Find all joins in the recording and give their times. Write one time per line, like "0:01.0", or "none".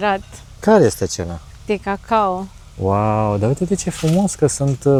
none